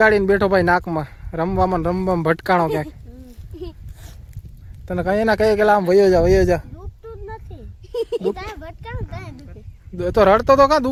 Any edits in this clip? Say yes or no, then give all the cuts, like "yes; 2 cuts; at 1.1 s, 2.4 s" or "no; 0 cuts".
no; 0 cuts